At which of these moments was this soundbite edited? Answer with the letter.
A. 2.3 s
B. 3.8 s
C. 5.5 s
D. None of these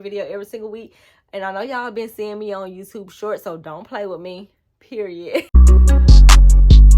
C